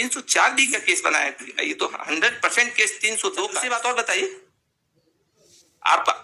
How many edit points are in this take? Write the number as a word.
one